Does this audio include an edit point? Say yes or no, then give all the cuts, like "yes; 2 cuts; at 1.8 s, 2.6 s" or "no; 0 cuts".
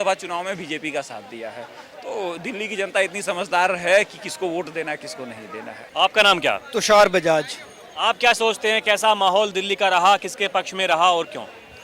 no; 0 cuts